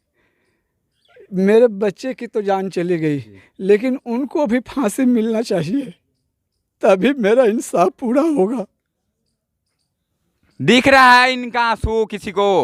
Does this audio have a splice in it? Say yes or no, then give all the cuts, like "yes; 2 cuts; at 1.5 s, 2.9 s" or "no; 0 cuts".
no; 0 cuts